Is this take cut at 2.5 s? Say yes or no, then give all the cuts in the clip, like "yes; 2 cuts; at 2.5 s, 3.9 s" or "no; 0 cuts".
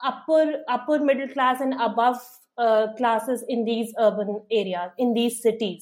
no; 0 cuts